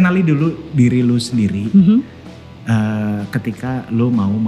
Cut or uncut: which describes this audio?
uncut